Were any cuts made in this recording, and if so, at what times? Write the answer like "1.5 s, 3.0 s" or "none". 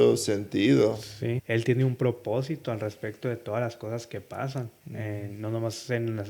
1.4 s, 4.8 s